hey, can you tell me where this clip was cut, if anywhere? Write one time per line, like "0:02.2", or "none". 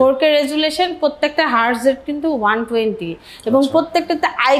none